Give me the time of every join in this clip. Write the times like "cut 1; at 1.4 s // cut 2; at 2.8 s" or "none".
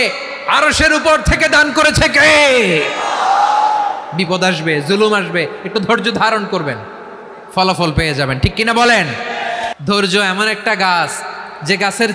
cut 1; at 9.8 s